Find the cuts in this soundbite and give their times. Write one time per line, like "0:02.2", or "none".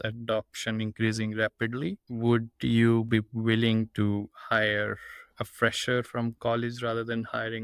0:02.0